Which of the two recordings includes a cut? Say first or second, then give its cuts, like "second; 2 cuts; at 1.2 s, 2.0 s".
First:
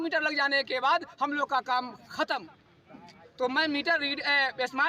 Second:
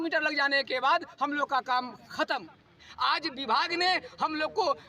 second; 1 cut; at 2.9 s